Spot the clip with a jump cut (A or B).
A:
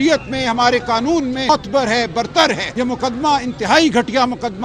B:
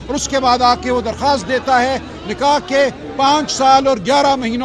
A